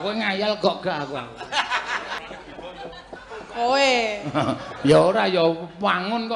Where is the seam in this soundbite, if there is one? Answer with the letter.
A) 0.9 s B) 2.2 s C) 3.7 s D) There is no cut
B